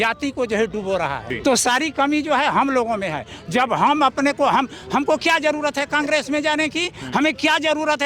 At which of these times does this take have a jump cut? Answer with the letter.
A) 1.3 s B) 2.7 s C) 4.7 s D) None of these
A